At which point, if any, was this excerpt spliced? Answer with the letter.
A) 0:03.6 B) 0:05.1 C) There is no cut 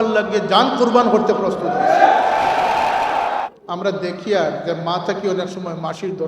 A